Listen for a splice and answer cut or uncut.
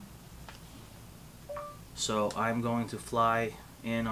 cut